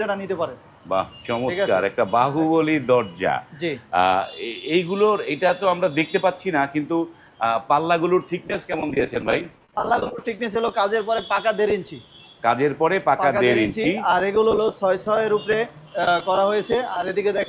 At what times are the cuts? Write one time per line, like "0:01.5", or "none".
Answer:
none